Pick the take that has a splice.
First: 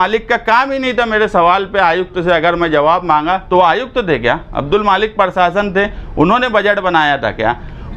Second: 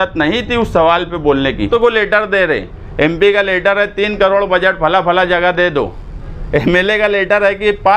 second; 1 cut; at 1.7 s

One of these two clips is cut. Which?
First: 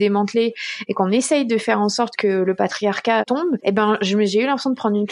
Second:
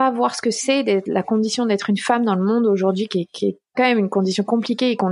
first; 1 cut; at 3.2 s

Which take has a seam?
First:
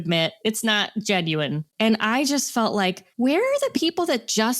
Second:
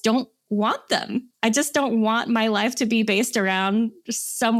first; 2 cuts; at 1.6 s, 3.0 s

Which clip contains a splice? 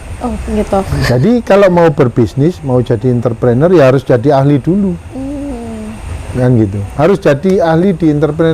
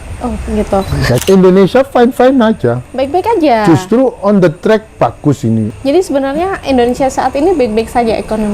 second; 2 cuts; at 1.2 s, 5.7 s

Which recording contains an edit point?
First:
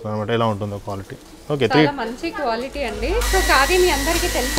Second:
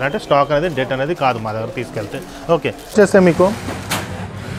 second; 1 cut; at 2.9 s

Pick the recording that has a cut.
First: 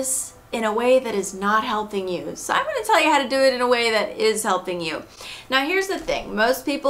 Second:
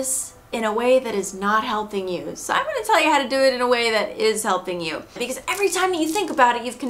second; 1 cut; at 5.2 s

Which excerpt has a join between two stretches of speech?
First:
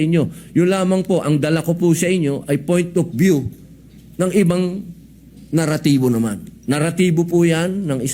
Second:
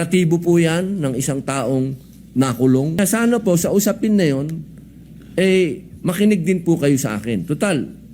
second; 1 cut; at 3.0 s

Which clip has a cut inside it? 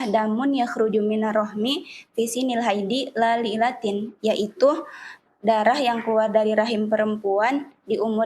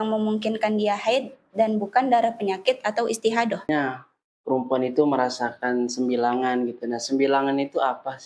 second; 1 cut; at 3.7 s

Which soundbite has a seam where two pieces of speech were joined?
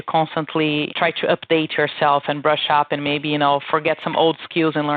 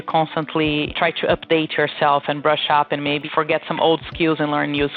second; 1 cut; at 3.3 s

